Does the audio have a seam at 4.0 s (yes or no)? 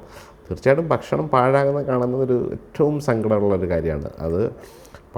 no